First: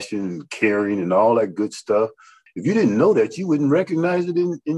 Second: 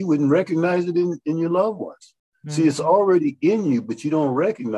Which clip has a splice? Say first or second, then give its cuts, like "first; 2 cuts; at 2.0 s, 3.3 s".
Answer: first; 1 cut; at 2.4 s